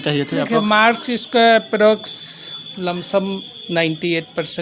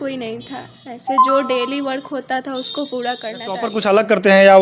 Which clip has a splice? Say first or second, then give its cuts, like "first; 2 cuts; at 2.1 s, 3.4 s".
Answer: second; 1 cut; at 3.6 s